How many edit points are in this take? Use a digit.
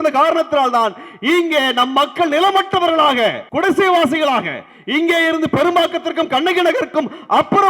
1